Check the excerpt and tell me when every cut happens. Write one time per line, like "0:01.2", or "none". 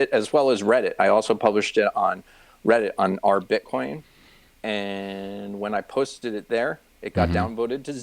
none